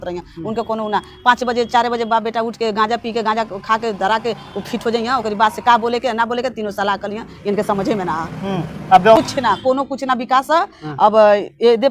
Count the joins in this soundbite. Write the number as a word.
one